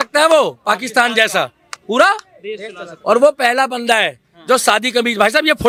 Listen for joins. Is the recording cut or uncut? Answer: uncut